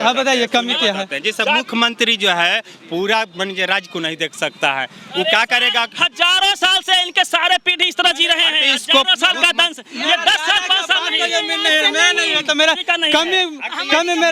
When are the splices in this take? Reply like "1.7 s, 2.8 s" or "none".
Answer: none